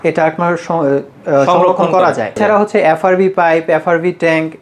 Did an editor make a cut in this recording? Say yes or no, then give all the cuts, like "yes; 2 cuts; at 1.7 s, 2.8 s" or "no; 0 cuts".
yes; 1 cut; at 2.4 s